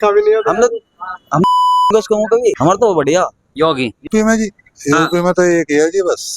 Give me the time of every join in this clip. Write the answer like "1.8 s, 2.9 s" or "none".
4.1 s